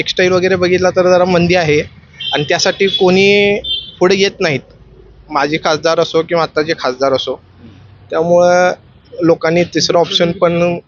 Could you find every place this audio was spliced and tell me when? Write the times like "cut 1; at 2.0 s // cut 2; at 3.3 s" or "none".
none